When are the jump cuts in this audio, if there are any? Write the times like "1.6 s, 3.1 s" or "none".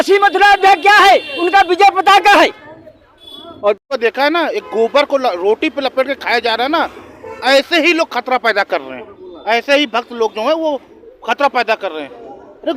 3.9 s